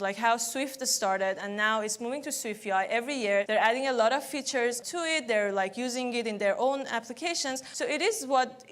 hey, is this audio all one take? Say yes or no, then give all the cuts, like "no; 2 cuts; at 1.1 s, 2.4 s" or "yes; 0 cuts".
no; 3 cuts; at 3.5 s, 4.8 s, 7.6 s